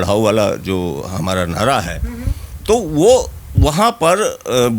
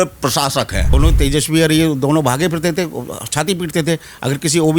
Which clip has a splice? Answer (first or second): second